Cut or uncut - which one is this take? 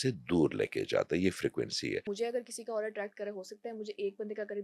cut